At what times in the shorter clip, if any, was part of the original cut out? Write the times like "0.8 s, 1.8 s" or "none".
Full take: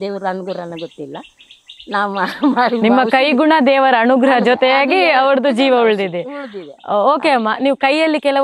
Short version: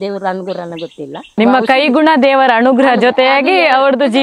1.4 s